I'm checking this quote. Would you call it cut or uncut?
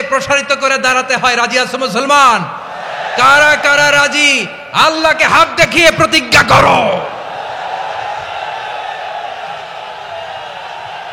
uncut